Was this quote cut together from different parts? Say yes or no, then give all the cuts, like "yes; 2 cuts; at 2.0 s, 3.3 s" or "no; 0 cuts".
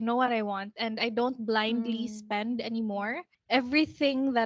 yes; 1 cut; at 3.3 s